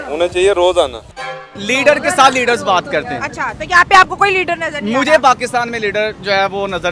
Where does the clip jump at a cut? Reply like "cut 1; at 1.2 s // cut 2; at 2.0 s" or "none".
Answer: cut 1; at 1.4 s // cut 2; at 5.0 s